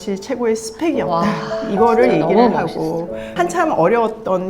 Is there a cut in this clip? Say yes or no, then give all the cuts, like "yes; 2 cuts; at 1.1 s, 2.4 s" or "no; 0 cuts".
yes; 1 cut; at 3.3 s